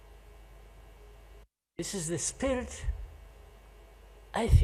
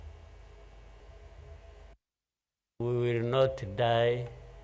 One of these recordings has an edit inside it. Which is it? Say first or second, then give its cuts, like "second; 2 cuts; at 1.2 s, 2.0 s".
second; 1 cut; at 1.0 s